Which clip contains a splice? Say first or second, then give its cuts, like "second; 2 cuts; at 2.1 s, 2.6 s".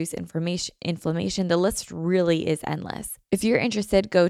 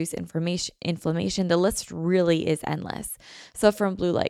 first; 1 cut; at 3.1 s